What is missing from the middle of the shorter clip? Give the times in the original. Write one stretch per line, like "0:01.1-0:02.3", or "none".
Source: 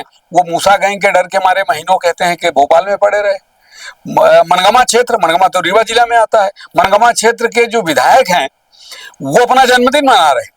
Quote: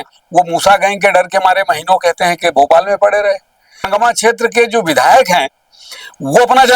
0:03.9-0:06.9